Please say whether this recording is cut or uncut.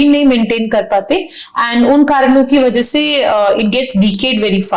uncut